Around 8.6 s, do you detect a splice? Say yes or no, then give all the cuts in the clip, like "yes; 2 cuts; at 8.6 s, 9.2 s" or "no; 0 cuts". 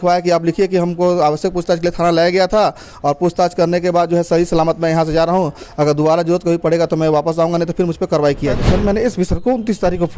yes; 1 cut; at 8.6 s